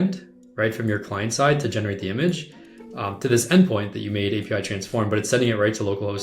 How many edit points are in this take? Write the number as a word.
zero